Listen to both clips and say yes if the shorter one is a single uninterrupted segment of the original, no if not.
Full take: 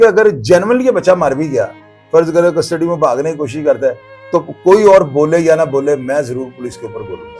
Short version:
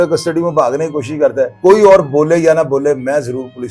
no